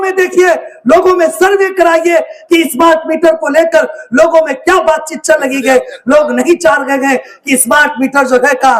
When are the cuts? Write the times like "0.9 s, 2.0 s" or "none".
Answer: none